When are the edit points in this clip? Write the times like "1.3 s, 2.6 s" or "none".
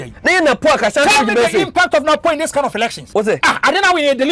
3.2 s